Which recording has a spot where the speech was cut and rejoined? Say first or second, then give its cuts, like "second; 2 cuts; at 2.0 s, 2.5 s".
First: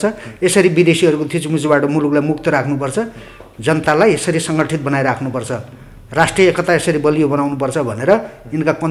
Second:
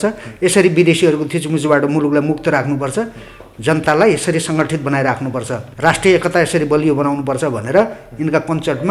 second; 1 cut; at 5.6 s